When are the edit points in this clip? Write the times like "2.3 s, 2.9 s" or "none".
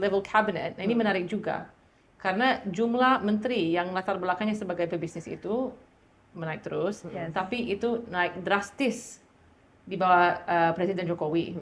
none